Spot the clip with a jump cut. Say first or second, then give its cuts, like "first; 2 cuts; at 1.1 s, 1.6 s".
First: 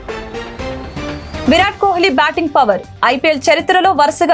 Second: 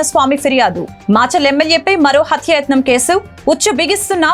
first; 1 cut; at 1.4 s